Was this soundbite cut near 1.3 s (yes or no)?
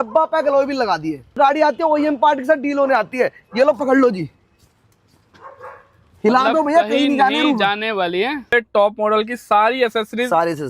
yes